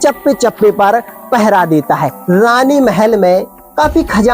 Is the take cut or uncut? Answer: cut